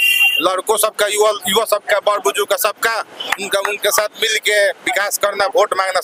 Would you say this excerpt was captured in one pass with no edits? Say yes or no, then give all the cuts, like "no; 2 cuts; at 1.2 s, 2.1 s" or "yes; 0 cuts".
yes; 0 cuts